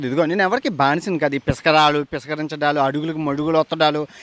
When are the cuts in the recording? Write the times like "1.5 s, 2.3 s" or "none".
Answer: none